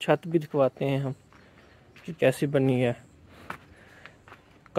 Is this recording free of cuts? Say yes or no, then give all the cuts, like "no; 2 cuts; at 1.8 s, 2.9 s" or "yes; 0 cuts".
yes; 0 cuts